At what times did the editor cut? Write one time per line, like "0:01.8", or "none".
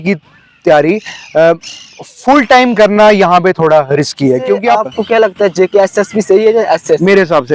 0:04.9